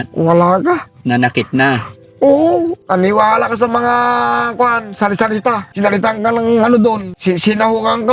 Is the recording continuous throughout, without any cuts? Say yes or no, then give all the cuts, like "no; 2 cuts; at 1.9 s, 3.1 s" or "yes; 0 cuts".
no; 3 cuts; at 2.8 s, 5.7 s, 7.1 s